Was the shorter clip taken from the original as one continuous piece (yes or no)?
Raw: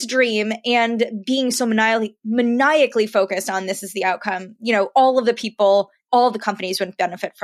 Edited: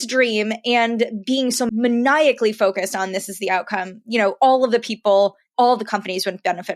no